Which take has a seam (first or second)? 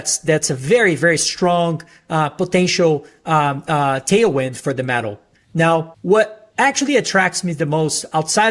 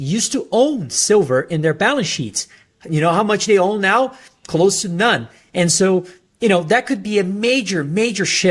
first